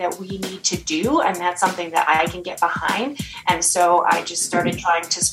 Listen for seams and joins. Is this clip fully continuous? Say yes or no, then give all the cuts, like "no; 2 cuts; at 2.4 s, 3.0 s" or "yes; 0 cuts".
yes; 0 cuts